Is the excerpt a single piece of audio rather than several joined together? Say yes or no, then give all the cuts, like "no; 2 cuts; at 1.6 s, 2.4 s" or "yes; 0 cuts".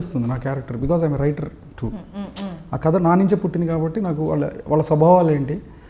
yes; 0 cuts